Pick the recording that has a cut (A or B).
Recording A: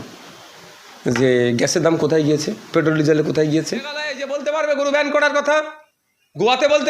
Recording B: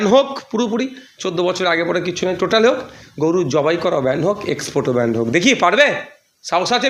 A